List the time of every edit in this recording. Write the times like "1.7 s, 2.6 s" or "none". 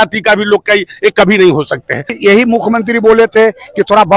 2.1 s

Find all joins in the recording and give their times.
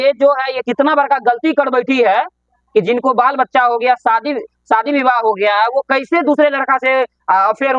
none

